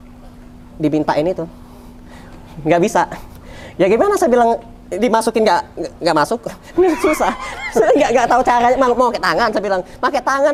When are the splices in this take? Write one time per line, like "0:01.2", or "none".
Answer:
none